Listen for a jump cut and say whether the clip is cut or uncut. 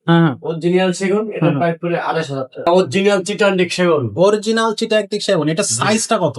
cut